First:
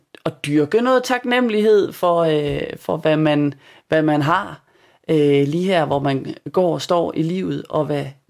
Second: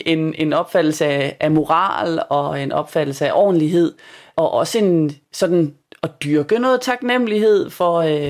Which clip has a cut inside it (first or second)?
second